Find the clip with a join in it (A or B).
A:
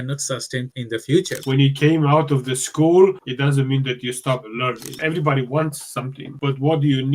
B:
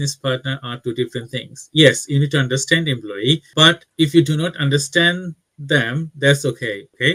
A